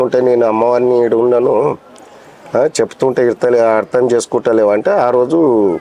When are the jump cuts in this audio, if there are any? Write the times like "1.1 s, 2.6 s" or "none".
none